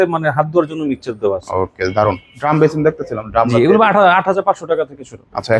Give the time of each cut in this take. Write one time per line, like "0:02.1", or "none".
0:02.3